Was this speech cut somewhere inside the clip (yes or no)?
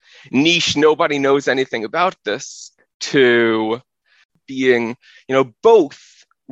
yes